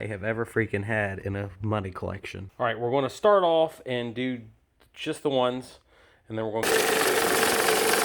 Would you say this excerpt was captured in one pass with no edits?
no; 2 cuts; at 2.4 s, 6.6 s

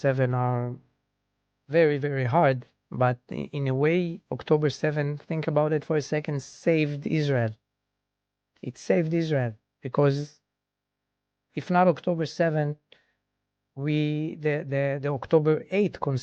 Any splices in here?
no; 0 cuts

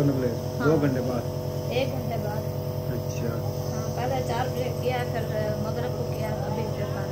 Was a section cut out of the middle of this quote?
no; 0 cuts

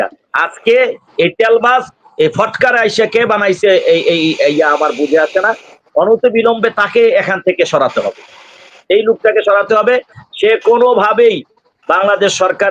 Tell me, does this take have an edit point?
no; 0 cuts

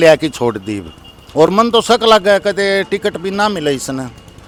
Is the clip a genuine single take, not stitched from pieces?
yes; 0 cuts

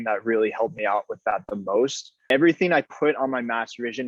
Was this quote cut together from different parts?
yes; 1 cut; at 2.2 s

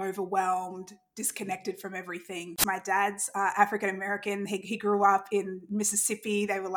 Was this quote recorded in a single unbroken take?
no; 1 cut; at 2.6 s

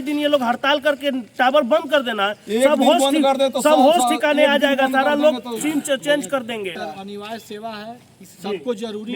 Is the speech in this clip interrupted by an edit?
yes; 1 cut; at 6.8 s

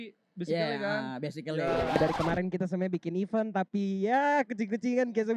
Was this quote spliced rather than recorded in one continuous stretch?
yes; 1 cut; at 1.9 s

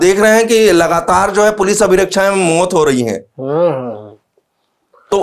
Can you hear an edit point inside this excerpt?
no; 0 cuts

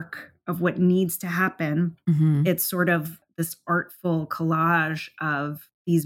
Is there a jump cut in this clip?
no; 0 cuts

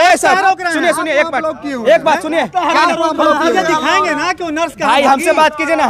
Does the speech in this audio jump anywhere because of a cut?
no; 0 cuts

